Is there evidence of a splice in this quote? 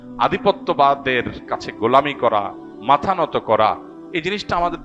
yes; 1 cut; at 3.9 s

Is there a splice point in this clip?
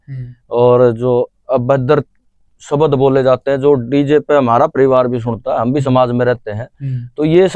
no; 0 cuts

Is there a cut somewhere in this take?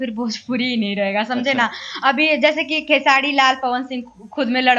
no; 0 cuts

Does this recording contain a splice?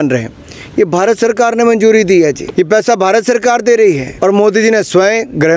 yes; 2 cuts; at 2.4 s, 4.1 s

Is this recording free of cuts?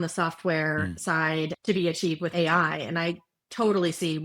no; 2 cuts; at 1.6 s, 2.3 s

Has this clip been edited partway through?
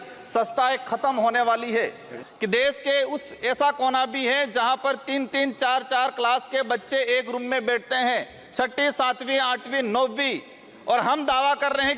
yes; 1 cut; at 2.1 s

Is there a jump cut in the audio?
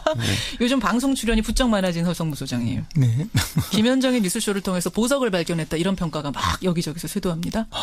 no; 0 cuts

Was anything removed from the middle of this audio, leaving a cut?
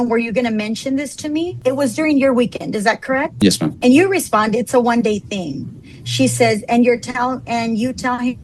yes; 1 cut; at 3.8 s

